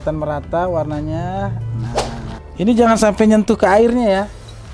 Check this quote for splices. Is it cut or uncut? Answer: cut